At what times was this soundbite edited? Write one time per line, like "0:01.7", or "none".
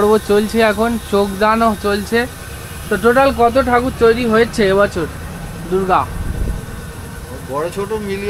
none